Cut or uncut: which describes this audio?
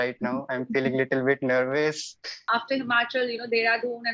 cut